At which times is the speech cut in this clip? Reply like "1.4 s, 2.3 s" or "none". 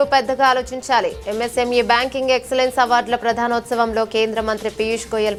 none